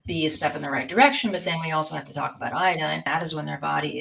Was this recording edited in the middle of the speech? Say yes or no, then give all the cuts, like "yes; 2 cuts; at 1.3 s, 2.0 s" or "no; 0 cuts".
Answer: yes; 1 cut; at 3.0 s